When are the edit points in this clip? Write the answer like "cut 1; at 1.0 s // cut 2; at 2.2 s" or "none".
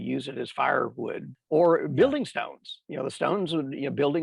cut 1; at 1.3 s